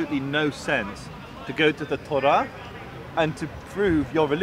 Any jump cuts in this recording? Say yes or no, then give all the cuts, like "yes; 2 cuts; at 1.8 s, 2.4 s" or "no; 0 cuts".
no; 0 cuts